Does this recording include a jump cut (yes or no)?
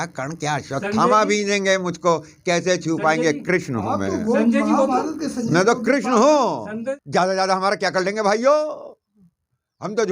yes